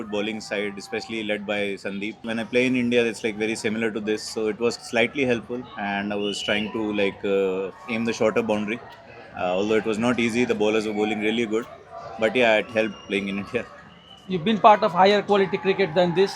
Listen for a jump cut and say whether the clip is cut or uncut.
cut